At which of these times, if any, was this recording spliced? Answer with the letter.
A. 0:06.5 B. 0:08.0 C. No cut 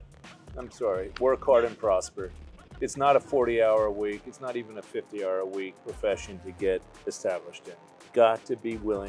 B